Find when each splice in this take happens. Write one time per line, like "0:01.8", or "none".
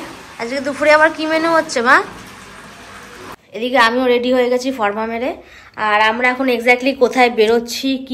0:03.4